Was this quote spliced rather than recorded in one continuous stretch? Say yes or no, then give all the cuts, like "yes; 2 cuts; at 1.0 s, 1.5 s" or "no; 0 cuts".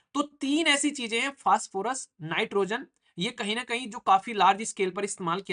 no; 0 cuts